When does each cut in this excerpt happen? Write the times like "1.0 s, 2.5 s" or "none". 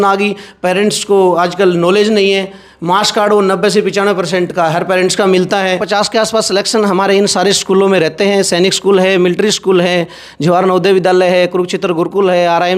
5.8 s